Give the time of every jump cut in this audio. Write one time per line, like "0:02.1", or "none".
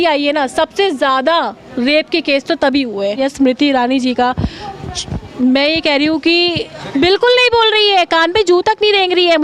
0:03.2
0:06.7